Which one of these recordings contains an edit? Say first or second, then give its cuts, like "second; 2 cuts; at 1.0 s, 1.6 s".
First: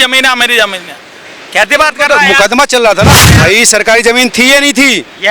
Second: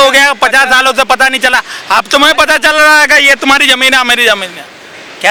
first; 1 cut; at 3.3 s